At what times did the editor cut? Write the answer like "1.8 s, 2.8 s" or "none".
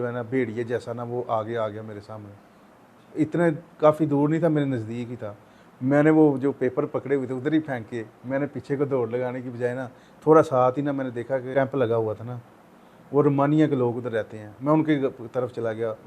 11.5 s

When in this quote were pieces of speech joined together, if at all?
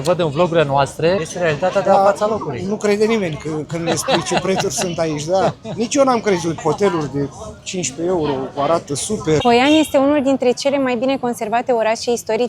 1.2 s, 6.6 s, 9.4 s

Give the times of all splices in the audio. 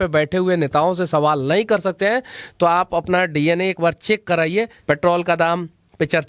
4.8 s

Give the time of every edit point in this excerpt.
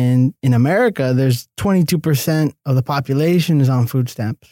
1.5 s

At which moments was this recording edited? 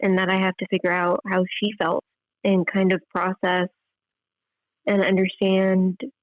2.2 s

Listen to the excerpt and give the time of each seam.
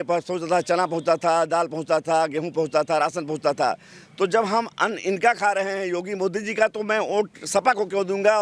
none

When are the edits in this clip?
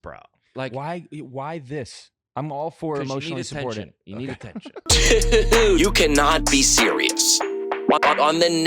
4.8 s

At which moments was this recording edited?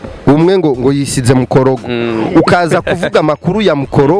none

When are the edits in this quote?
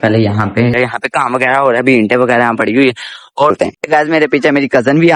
0.7 s, 3.5 s

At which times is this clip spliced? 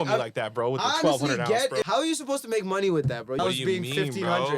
1.8 s, 3.4 s

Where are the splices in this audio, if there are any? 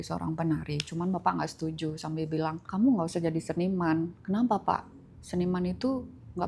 2.6 s

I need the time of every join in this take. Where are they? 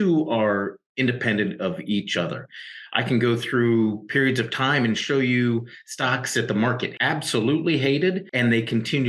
6.9 s, 8.3 s

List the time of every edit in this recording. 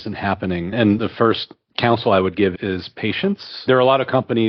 1.0 s, 3.7 s

